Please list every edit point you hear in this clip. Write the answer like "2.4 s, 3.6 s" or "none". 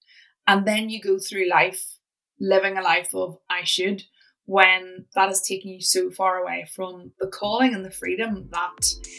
none